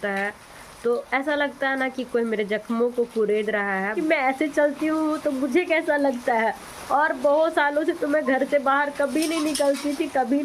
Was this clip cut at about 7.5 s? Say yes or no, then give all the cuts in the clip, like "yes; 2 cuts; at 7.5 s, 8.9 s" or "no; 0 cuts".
no; 1 cut; at 4.0 s